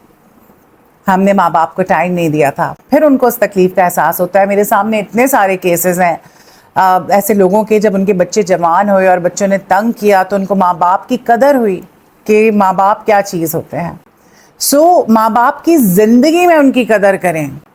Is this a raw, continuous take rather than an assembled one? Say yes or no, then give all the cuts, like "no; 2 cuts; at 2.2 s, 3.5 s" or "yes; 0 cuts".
yes; 0 cuts